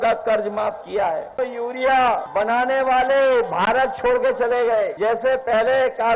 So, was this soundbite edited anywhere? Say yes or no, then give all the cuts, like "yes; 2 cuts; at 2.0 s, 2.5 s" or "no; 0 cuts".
yes; 3 cuts; at 1.4 s, 2.3 s, 4.9 s